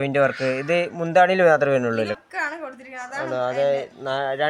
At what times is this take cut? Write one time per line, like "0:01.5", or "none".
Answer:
0:02.2